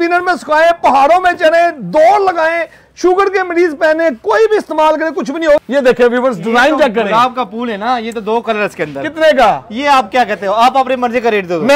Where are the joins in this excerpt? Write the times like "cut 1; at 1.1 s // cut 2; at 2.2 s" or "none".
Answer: cut 1; at 5.6 s